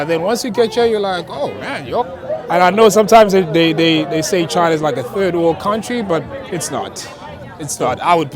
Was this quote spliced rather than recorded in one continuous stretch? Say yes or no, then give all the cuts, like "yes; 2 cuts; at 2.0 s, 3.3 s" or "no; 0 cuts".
yes; 1 cut; at 2.0 s